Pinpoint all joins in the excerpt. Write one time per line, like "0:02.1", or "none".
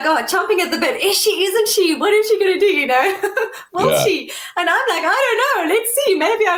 none